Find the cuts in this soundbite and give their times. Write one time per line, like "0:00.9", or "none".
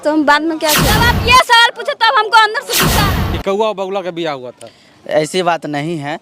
0:01.0
0:03.0